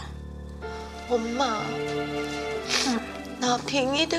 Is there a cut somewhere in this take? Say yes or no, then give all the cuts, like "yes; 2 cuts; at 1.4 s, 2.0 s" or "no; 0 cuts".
no; 0 cuts